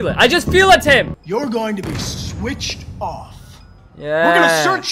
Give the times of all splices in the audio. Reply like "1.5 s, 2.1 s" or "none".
1.2 s